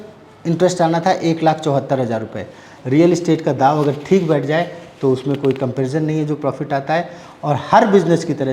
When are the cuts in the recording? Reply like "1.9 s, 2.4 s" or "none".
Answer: 2.7 s